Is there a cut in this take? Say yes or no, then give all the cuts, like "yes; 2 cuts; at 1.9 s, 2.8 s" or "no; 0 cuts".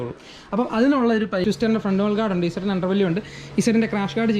yes; 1 cut; at 1.4 s